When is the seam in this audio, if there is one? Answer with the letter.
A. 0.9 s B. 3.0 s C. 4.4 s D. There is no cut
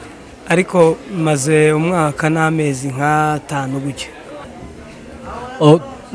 C